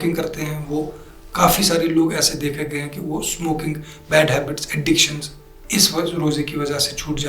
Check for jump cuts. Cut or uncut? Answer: uncut